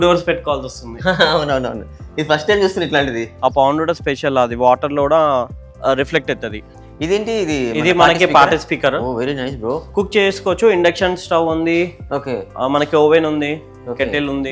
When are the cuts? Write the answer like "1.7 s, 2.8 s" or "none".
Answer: 3.3 s, 6.7 s, 9.8 s